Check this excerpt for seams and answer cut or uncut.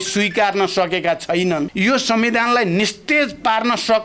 cut